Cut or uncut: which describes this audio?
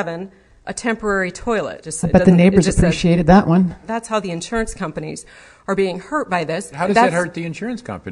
cut